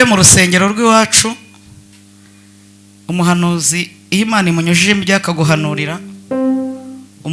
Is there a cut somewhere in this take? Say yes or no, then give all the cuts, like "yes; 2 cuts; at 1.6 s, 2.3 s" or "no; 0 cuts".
no; 0 cuts